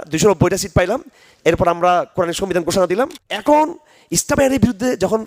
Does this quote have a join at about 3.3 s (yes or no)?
yes